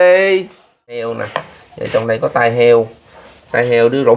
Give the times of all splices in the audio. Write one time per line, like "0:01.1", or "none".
0:01.0